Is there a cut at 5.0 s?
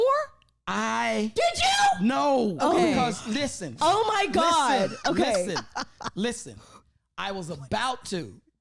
no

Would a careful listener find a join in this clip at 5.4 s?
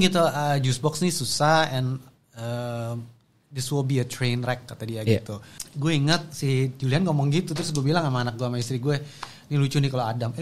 yes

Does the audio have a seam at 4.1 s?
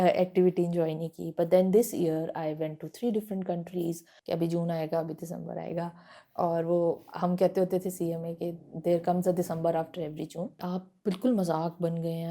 yes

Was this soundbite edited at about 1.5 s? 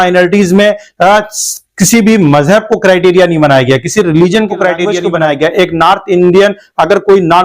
no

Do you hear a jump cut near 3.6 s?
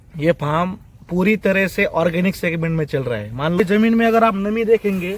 yes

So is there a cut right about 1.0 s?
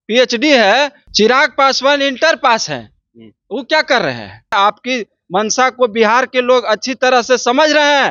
yes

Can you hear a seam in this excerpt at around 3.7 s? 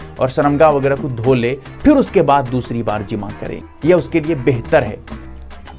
no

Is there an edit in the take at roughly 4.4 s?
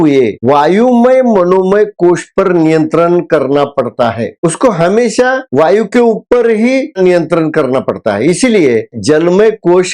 no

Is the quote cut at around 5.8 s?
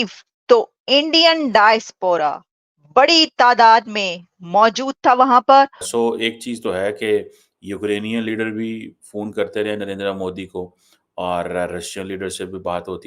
yes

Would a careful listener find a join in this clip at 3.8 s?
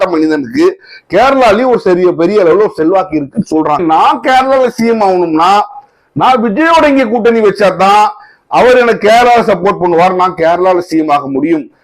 yes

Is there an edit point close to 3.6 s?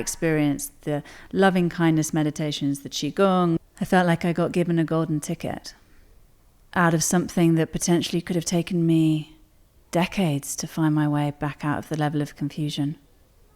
yes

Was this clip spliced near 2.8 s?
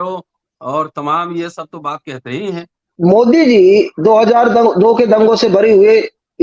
yes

